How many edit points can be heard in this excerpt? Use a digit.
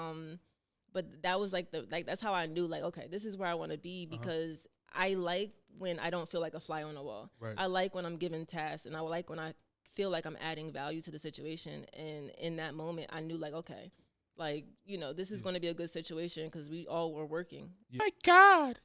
1